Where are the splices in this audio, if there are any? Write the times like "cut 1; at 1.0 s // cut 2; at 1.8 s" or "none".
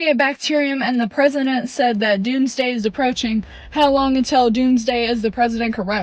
none

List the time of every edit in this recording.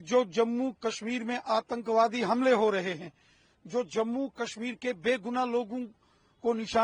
none

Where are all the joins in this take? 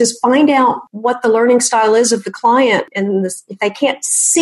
cut 1; at 0.9 s // cut 2; at 2.9 s

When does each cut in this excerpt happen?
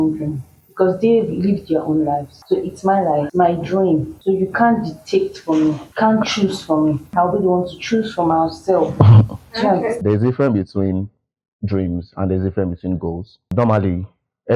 cut 1; at 2.3 s // cut 2; at 3.3 s // cut 3; at 4.1 s // cut 4; at 5.9 s // cut 5; at 7.0 s // cut 6; at 10.0 s // cut 7; at 13.5 s

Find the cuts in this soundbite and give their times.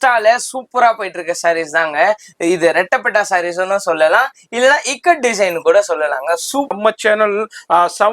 cut 1; at 6.8 s

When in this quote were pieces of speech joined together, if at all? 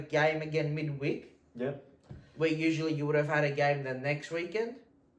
none

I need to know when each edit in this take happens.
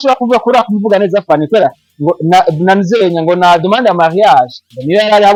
none

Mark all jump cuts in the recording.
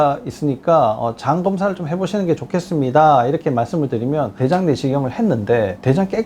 none

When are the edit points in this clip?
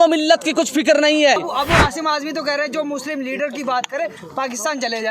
cut 1; at 1.4 s

